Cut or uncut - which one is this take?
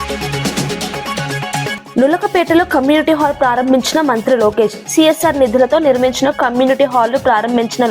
cut